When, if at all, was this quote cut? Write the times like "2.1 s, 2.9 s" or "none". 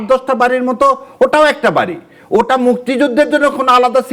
none

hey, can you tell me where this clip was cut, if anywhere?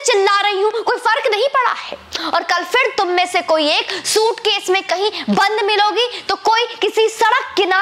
none

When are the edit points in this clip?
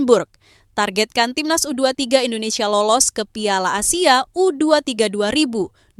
none

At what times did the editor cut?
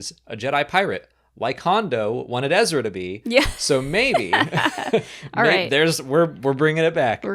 none

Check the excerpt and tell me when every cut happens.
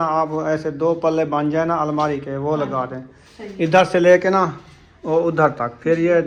none

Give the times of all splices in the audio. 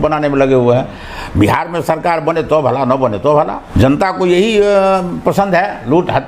3.6 s

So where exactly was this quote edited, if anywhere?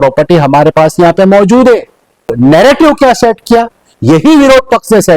2.3 s

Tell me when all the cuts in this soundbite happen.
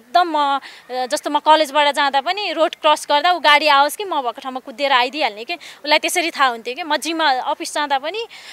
none

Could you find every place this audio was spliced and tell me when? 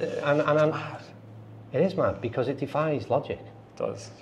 none

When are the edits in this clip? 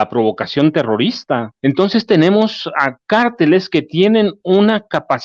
1.5 s

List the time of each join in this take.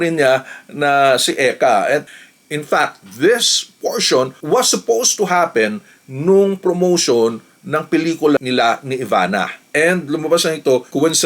2.0 s, 9.6 s

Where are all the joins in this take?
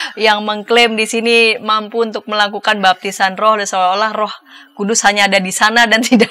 none

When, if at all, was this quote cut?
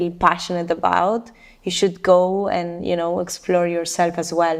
none

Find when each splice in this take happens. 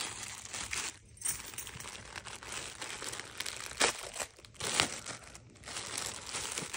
none

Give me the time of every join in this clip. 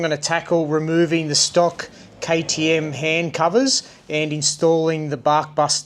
4.5 s

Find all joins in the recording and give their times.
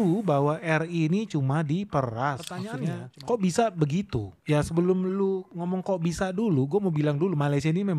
2.8 s

